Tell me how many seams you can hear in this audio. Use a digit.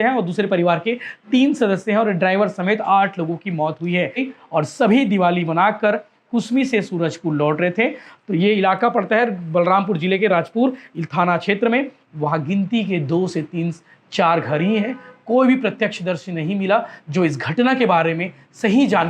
2